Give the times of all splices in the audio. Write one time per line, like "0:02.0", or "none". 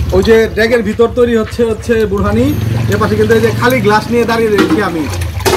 none